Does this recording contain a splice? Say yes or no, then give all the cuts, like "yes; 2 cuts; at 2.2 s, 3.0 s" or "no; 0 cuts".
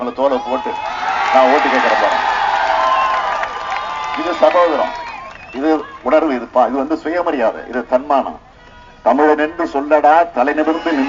no; 0 cuts